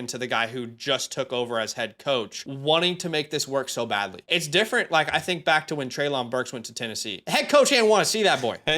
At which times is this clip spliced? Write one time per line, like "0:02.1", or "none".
0:02.4
0:04.2
0:07.1